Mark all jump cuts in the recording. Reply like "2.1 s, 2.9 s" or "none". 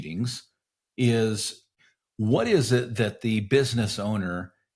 1.8 s